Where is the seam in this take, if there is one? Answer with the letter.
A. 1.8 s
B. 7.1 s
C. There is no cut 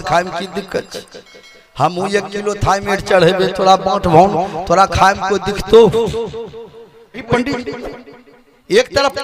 B